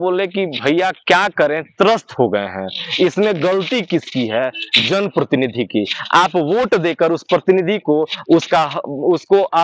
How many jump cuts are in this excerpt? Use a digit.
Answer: 0